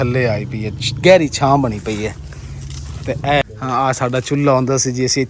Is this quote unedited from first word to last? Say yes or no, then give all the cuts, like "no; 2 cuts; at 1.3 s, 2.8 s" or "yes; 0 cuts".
no; 1 cut; at 3.4 s